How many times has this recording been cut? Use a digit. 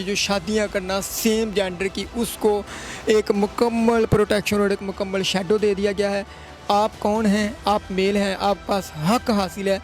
0